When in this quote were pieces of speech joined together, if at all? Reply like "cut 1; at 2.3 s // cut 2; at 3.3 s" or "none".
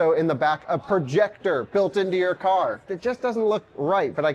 cut 1; at 2.9 s